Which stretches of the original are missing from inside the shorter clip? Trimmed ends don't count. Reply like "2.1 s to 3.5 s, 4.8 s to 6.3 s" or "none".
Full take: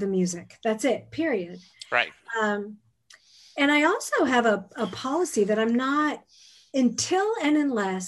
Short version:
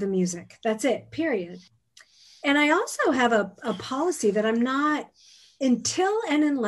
1.7 s to 2.8 s